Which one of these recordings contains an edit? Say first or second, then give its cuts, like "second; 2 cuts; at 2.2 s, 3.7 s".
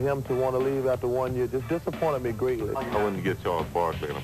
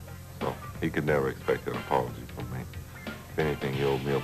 first; 1 cut; at 2.7 s